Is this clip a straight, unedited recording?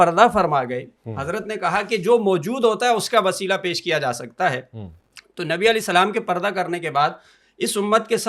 yes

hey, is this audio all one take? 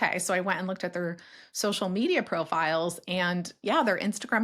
yes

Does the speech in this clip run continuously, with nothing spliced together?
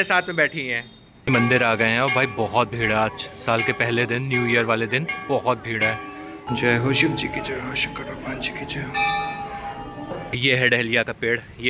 no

